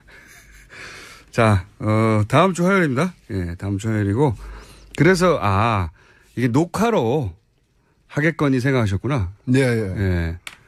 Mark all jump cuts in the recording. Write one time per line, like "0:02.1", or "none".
none